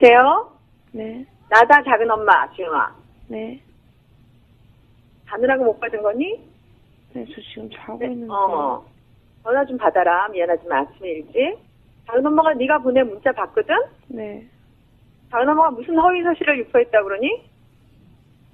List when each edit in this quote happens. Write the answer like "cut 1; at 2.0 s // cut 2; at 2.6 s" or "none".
cut 1; at 6.2 s